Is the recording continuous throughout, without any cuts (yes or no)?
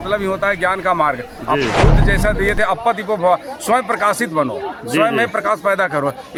yes